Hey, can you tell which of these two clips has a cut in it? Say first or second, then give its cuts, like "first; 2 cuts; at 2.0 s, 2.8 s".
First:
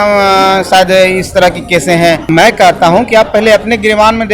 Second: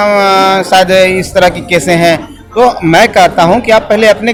first; 1 cut; at 2.2 s